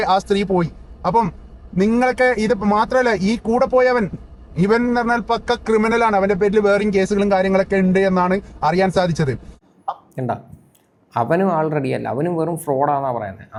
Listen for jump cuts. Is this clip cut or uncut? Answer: uncut